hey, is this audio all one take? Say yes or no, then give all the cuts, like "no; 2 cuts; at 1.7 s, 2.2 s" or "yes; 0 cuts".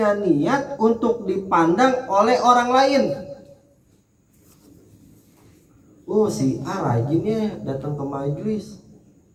yes; 0 cuts